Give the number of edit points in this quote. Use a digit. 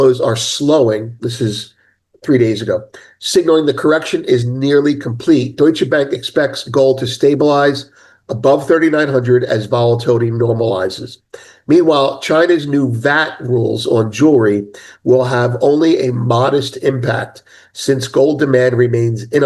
0